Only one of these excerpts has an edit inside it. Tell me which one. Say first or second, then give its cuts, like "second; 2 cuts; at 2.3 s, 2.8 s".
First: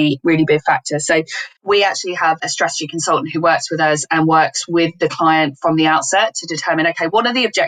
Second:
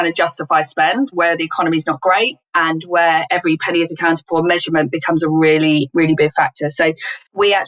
second; 2 cuts; at 1.1 s, 3.2 s